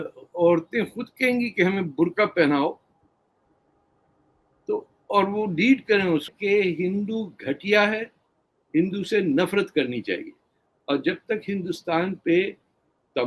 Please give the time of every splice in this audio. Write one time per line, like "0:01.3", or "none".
0:06.3